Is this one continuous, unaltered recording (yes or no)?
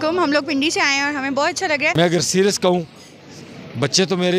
no